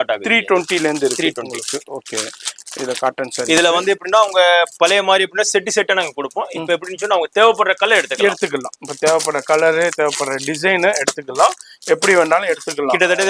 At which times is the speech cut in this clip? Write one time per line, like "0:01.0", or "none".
none